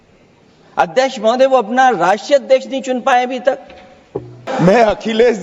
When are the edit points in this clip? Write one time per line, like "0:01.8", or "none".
0:04.4